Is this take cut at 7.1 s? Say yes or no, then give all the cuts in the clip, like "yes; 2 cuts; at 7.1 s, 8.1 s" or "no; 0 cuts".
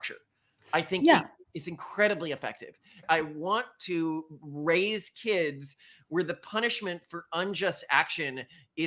no; 1 cut; at 3.0 s